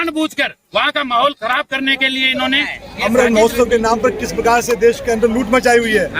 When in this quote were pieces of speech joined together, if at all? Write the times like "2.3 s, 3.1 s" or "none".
2.8 s